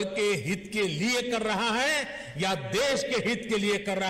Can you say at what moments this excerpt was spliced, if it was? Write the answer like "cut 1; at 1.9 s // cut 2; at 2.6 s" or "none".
none

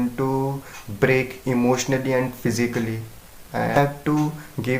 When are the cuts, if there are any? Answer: cut 1; at 3.7 s

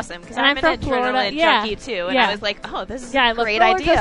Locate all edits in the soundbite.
none

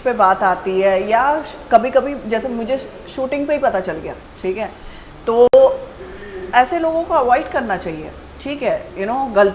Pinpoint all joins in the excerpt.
none

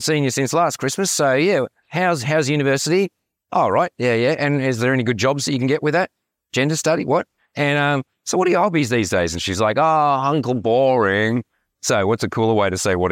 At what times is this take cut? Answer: cut 1; at 7.4 s

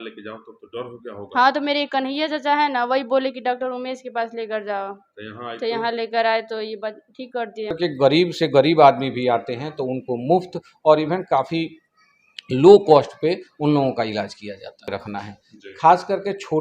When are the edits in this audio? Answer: cut 1; at 7.8 s // cut 2; at 14.9 s

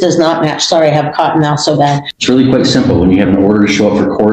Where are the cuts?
cut 1; at 2.1 s

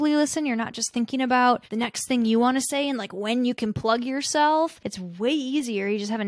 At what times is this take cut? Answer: none

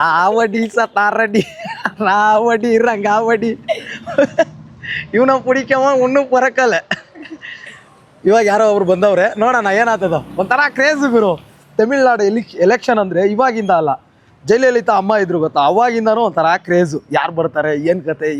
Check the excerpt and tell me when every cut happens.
none

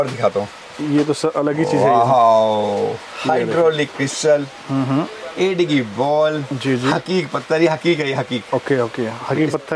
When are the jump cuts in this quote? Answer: none

